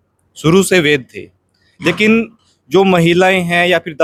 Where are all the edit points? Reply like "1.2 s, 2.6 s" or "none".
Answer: none